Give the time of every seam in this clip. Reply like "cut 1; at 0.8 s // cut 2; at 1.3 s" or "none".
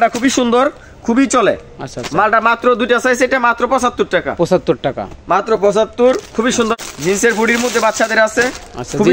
cut 1; at 6.7 s